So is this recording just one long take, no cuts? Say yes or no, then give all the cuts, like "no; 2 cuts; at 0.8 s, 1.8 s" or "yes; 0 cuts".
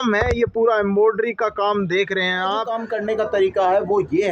no; 1 cut; at 2.8 s